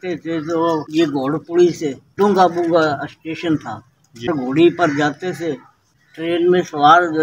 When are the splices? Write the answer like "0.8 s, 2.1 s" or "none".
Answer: 0.9 s, 2.1 s, 4.3 s, 5.8 s